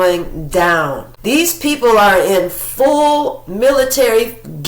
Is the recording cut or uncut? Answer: cut